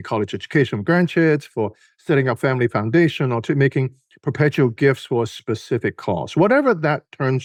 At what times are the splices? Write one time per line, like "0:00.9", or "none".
none